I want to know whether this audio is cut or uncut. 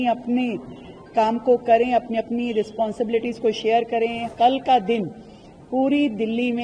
cut